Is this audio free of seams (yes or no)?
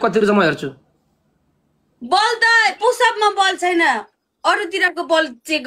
yes